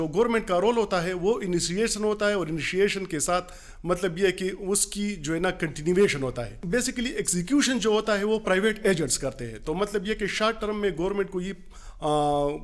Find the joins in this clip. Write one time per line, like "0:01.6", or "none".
0:06.5